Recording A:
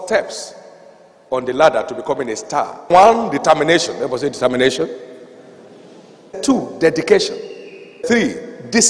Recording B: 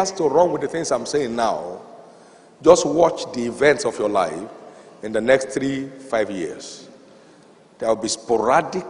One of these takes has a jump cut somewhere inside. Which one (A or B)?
A